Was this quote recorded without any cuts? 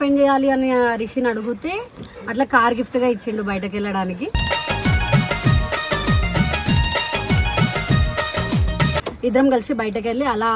no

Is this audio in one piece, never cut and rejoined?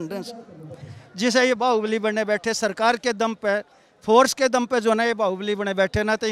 yes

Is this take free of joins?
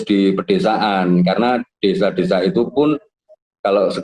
yes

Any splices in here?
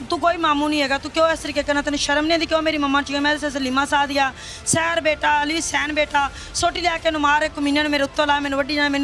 no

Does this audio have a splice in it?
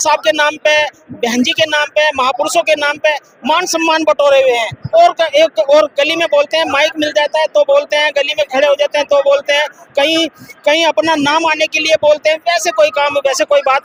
no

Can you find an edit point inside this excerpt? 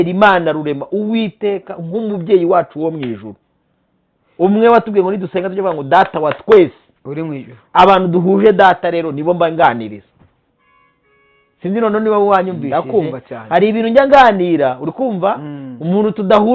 no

